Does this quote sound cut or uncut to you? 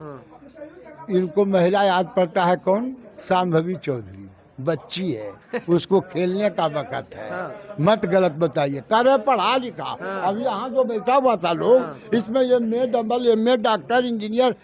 uncut